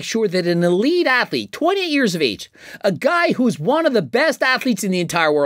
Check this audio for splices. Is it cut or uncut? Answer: uncut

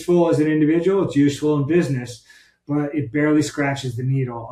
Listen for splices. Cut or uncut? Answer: uncut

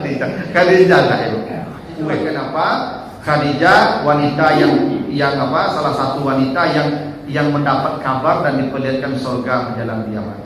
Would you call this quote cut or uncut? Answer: cut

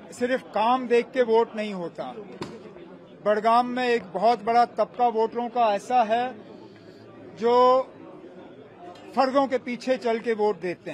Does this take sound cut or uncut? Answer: uncut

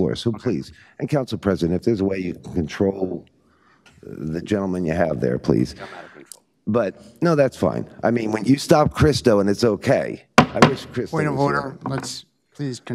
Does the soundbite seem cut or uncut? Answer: uncut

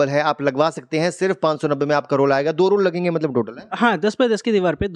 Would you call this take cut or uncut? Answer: uncut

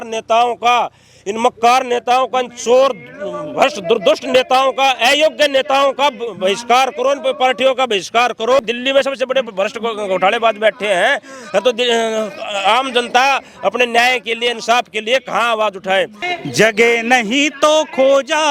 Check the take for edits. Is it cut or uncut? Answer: cut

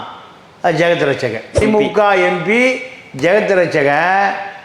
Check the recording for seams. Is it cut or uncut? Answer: cut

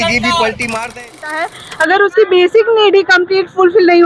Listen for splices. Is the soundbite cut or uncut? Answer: cut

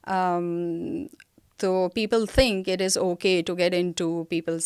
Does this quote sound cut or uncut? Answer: uncut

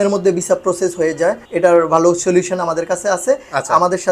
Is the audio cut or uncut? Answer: cut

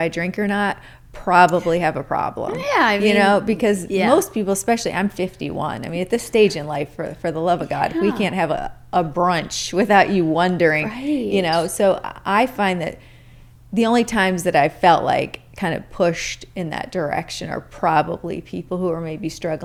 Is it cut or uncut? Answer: uncut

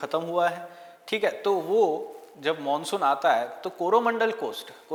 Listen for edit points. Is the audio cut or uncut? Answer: uncut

